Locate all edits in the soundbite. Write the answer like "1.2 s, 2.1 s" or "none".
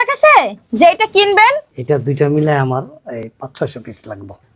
1.7 s

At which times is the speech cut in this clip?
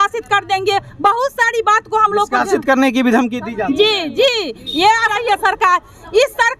5.1 s

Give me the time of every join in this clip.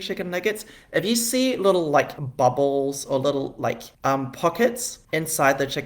2.2 s, 3.9 s, 4.9 s

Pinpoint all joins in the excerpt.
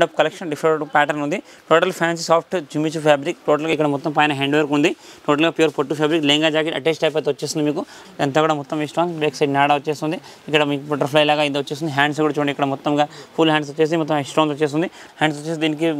3.7 s, 8.0 s, 15.0 s

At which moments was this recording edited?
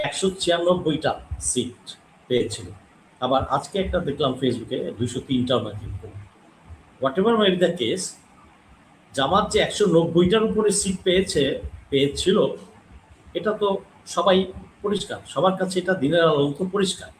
none

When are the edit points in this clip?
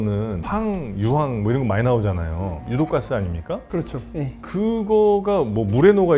none

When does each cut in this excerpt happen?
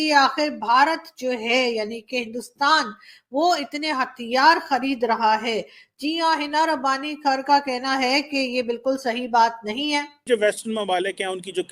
10.2 s

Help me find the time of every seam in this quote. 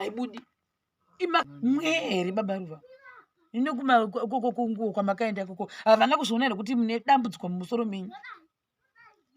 1.4 s

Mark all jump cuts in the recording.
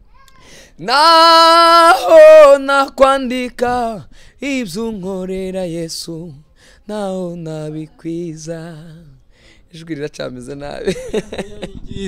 none

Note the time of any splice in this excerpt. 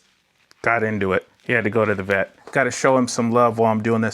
1.3 s, 2.4 s

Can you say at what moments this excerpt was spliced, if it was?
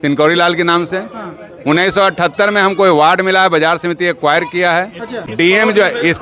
none

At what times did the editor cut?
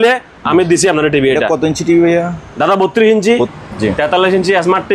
3.6 s

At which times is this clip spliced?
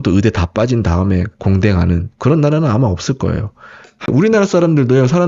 4.1 s

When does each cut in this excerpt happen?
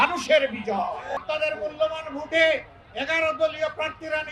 1.2 s

